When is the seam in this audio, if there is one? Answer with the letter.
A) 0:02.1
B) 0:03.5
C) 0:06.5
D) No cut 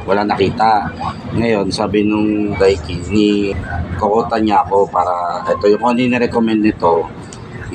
B